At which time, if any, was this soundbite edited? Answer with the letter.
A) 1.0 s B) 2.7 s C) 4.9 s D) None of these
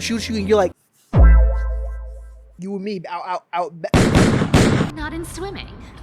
C